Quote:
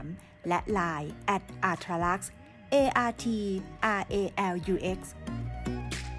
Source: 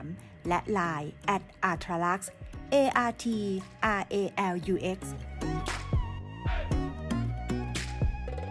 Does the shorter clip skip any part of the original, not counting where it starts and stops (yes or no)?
yes